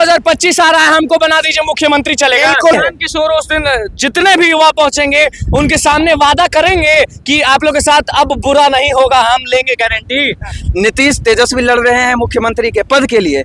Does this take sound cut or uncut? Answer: cut